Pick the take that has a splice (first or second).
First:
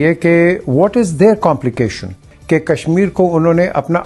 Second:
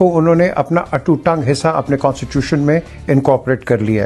first